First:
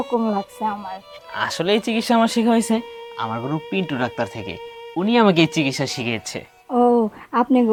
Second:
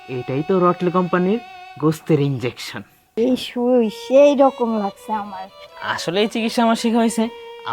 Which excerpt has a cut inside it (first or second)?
second